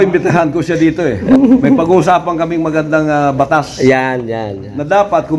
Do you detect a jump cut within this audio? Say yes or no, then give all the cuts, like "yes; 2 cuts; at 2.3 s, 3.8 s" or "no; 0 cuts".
yes; 1 cut; at 1.2 s